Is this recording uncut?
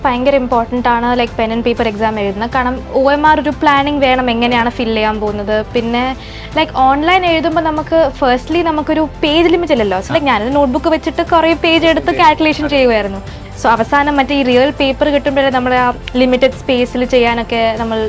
yes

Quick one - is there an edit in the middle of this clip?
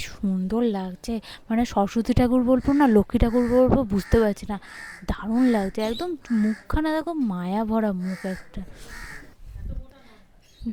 no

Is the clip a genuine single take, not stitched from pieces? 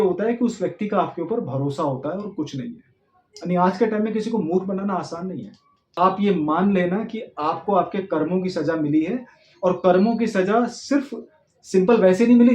no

